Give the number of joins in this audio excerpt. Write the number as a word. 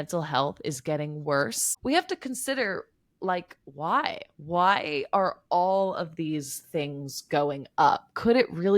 one